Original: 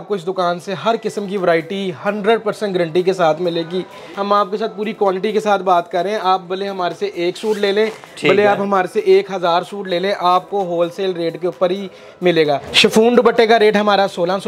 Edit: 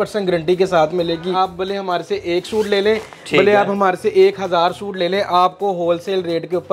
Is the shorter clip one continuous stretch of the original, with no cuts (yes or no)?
no